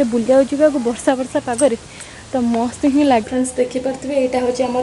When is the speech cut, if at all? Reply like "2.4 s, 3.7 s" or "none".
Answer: 3.3 s